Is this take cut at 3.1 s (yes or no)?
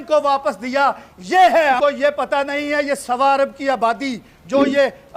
no